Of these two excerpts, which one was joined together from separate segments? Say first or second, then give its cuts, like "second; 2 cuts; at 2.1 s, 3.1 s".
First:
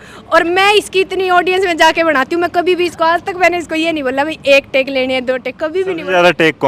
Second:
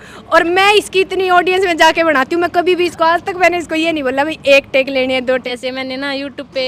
second; 1 cut; at 5.5 s